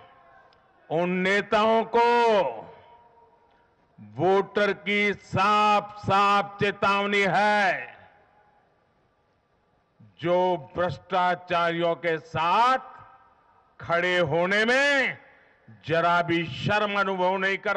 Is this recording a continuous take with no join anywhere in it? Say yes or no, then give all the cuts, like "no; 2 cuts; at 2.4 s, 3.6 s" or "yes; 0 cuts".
yes; 0 cuts